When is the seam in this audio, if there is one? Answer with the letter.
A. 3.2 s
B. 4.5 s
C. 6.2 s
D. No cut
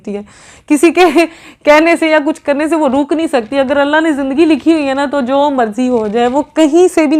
D